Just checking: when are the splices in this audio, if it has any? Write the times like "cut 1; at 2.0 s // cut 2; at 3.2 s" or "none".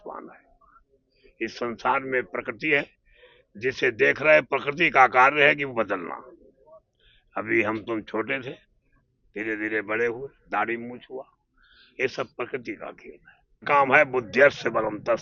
cut 1; at 13.7 s